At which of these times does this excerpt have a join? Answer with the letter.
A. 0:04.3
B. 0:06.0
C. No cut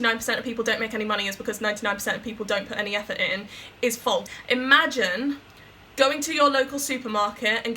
A